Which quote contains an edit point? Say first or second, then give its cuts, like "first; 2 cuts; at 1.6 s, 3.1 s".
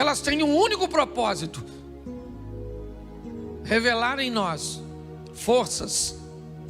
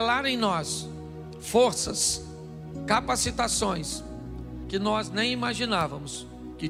first; 2 cuts; at 1.5 s, 3.0 s